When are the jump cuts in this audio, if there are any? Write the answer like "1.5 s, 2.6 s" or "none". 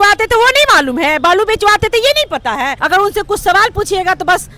2.8 s